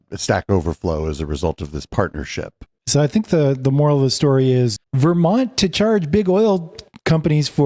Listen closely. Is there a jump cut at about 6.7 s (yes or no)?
no